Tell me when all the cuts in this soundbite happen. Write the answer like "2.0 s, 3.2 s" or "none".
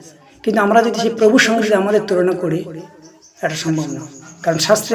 none